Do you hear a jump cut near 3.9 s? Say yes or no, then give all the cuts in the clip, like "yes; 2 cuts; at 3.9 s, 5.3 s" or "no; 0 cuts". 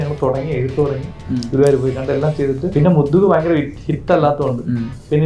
no; 1 cut; at 2.7 s